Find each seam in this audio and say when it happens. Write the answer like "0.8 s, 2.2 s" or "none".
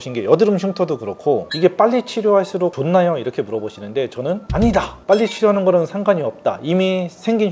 none